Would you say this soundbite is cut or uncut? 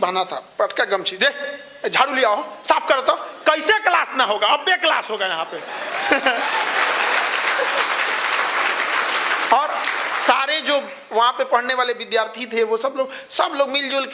uncut